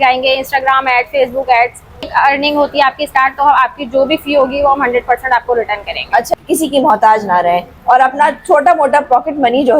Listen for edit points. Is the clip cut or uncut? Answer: cut